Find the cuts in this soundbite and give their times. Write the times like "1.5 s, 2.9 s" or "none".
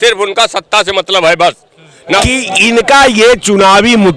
2.2 s